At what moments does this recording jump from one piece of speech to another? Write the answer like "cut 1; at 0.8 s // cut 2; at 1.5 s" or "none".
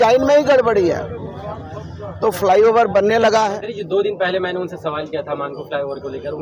cut 1; at 3.7 s